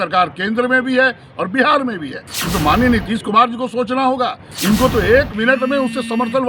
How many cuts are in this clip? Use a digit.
1